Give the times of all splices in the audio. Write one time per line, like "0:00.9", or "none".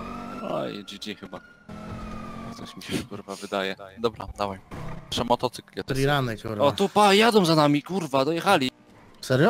0:05.8